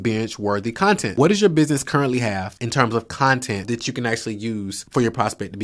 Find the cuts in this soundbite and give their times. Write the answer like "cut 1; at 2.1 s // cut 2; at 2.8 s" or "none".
cut 1; at 1.1 s // cut 2; at 2.5 s // cut 3; at 3.6 s // cut 4; at 4.8 s